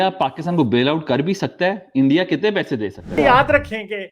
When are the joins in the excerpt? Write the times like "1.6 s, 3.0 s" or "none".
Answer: 3.1 s